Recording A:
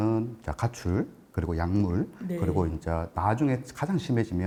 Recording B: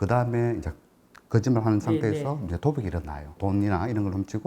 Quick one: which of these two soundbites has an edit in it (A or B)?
B